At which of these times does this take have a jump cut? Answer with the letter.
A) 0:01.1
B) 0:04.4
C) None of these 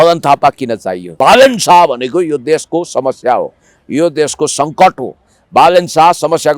A